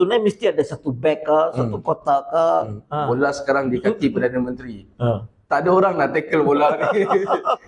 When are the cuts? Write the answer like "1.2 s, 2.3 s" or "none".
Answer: 2.9 s